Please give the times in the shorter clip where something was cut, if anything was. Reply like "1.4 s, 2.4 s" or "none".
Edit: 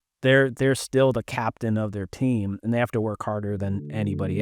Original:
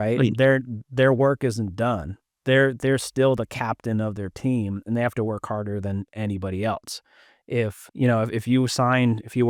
none